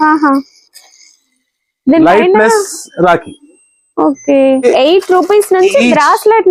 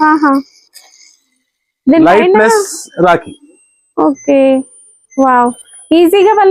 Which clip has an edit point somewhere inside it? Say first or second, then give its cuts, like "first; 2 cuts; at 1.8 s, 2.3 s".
first; 1 cut; at 4.6 s